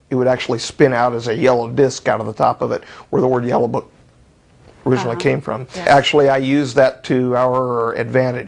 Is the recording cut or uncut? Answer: cut